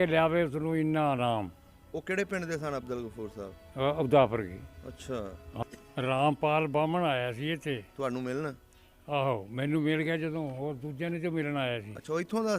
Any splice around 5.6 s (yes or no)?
yes